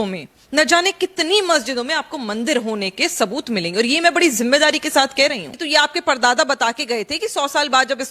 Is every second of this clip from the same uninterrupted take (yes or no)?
no